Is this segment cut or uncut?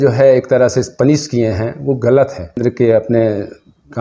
cut